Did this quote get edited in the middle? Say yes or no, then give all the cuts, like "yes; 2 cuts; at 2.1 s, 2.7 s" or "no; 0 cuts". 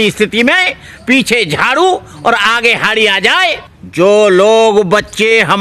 no; 0 cuts